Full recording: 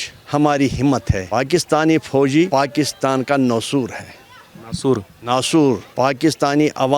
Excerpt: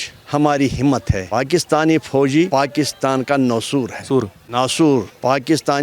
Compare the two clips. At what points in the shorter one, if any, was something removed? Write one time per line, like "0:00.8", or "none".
0:04.0